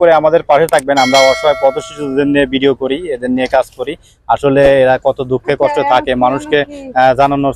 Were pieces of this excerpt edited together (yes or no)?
no